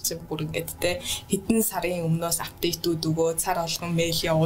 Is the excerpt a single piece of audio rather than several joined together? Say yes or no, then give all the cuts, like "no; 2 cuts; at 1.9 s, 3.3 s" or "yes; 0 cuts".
yes; 0 cuts